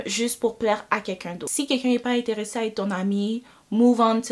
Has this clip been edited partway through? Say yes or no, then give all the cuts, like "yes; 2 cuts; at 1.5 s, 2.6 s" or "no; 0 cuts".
yes; 1 cut; at 1.6 s